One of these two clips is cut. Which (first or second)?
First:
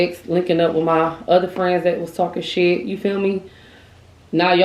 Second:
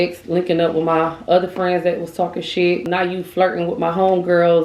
second